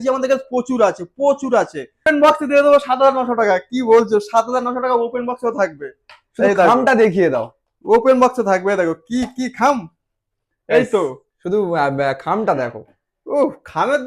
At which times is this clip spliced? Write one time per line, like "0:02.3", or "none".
0:02.0